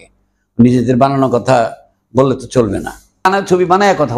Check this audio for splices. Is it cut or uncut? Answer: cut